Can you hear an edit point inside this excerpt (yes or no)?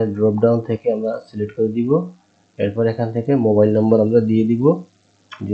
no